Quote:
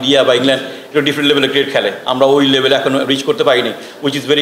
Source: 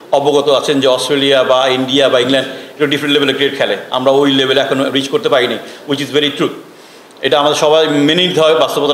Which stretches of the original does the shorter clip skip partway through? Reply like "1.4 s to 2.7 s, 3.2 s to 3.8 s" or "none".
none